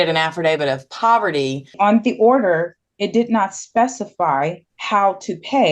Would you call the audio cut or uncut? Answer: cut